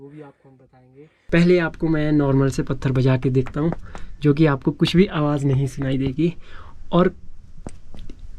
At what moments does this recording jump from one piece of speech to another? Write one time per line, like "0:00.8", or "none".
0:01.1